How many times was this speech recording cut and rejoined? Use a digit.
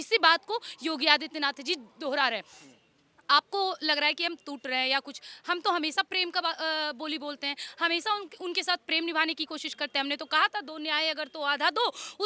0